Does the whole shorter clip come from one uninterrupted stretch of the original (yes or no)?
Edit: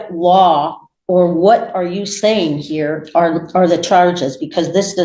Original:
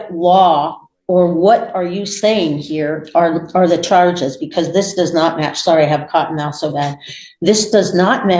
yes